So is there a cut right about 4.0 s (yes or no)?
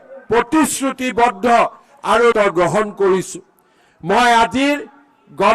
no